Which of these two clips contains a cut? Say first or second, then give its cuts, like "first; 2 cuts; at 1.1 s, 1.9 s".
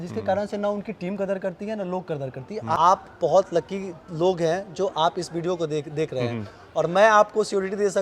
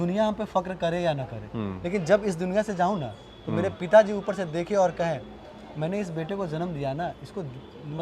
first; 1 cut; at 2.7 s